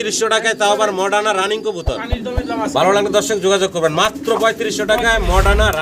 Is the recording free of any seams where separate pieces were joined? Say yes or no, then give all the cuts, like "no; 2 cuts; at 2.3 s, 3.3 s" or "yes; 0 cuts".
yes; 0 cuts